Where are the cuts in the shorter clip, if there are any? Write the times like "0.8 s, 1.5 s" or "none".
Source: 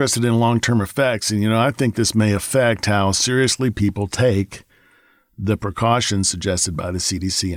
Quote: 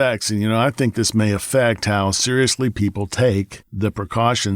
3.6 s